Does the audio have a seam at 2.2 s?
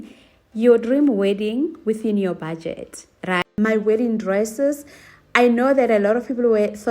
no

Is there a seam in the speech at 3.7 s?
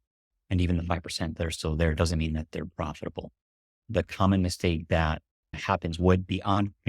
yes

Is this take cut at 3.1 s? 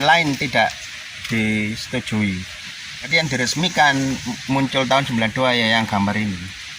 yes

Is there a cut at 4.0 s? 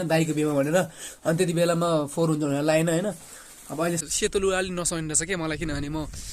yes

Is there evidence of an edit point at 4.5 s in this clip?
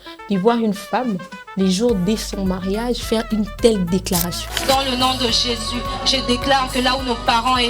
yes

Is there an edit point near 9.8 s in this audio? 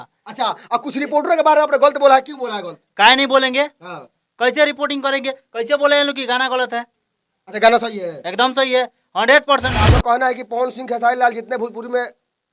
yes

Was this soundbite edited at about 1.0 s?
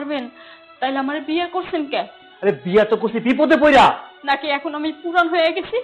no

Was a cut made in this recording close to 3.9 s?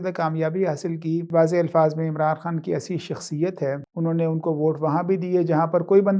yes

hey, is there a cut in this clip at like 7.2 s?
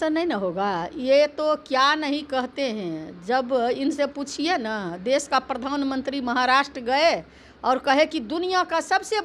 no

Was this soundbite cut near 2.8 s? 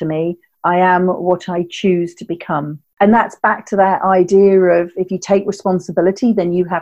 yes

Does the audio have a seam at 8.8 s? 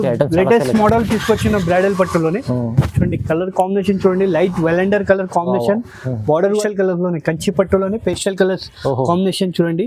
no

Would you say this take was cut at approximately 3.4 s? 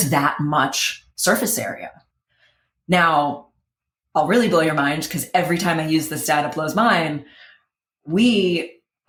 no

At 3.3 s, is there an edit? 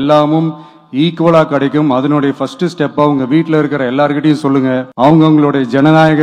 no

